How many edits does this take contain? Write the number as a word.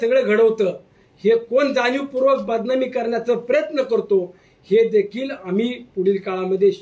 zero